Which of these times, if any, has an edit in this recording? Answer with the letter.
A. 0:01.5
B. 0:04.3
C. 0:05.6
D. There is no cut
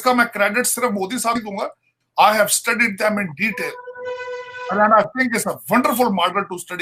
A